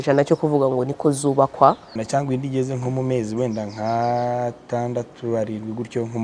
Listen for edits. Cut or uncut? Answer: cut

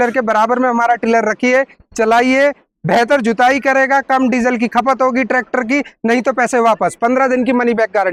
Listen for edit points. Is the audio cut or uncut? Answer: uncut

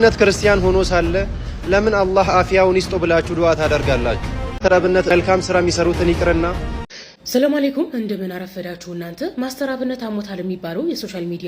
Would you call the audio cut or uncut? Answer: cut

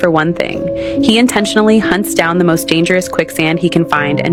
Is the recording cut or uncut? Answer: uncut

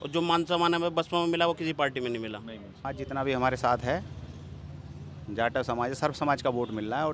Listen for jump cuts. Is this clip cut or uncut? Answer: cut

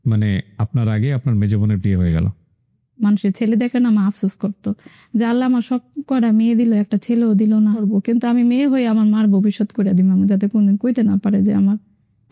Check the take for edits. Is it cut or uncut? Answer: cut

